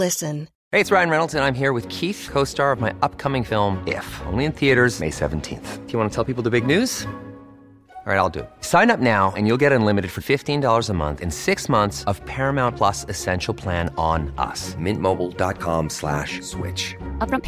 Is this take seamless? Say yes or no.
yes